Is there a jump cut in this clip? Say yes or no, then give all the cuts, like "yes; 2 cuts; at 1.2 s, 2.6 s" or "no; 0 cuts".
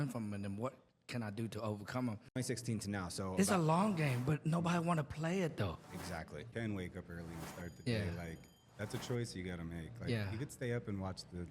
yes; 2 cuts; at 2.4 s, 6.5 s